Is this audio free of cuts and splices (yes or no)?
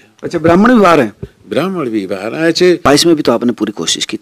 no